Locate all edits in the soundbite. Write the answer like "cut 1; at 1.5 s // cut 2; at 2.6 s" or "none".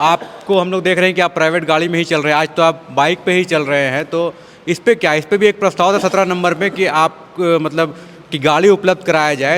none